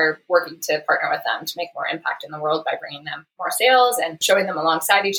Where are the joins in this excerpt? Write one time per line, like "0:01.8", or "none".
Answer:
0:04.2